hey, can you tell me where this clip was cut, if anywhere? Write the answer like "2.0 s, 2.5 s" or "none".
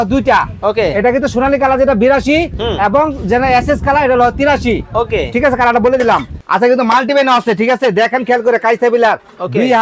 6.3 s